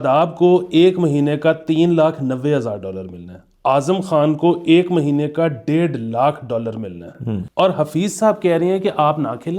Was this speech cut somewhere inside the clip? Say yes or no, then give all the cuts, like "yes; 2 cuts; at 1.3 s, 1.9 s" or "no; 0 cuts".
yes; 1 cut; at 7.4 s